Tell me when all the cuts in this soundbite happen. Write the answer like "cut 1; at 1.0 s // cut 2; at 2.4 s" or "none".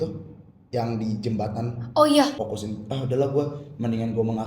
cut 1; at 2.3 s

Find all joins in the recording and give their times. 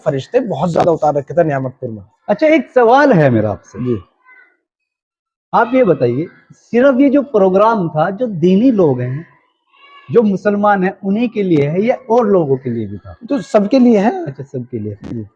none

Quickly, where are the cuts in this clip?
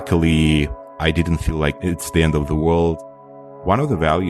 cut 1; at 3.1 s

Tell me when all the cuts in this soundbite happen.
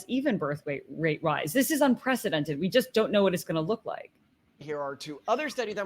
cut 1; at 4.6 s

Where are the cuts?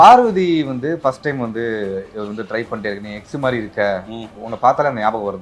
cut 1; at 4.5 s

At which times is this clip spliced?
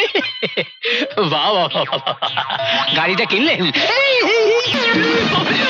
cut 1; at 4.8 s

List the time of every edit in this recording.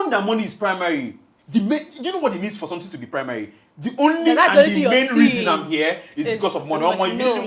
none

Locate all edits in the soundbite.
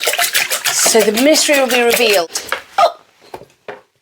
cut 1; at 2.4 s

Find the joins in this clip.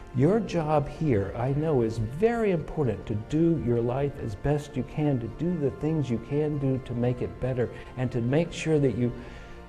cut 1; at 7.8 s

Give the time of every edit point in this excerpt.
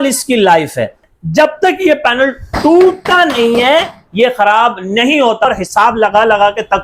cut 1; at 1.0 s // cut 2; at 5.4 s

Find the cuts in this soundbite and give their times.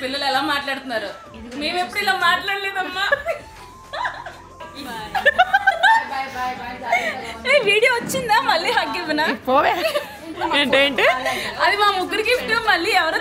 none

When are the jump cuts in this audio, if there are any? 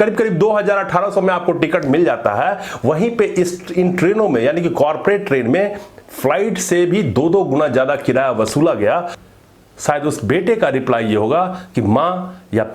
cut 1; at 9.2 s

